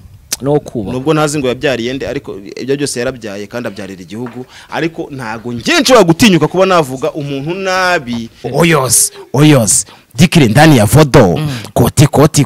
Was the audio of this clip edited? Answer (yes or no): yes